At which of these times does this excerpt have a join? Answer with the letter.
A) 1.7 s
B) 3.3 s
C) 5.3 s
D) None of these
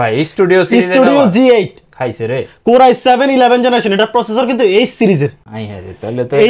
D